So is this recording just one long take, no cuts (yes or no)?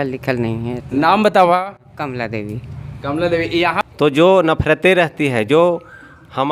no